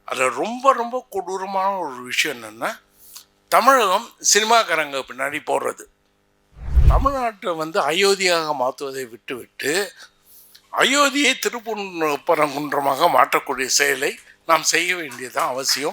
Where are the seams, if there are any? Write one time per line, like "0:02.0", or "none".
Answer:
0:06.7